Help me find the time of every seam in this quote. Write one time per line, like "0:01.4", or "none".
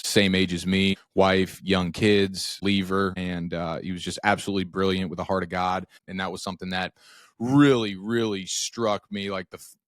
0:01.0
0:02.6
0:03.2
0:06.1